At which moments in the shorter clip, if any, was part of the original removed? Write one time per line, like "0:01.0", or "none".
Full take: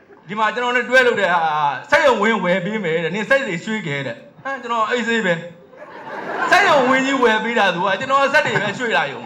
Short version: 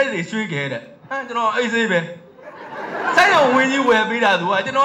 none